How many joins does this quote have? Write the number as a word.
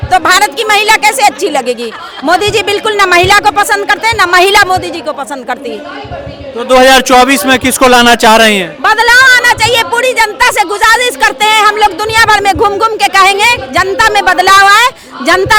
zero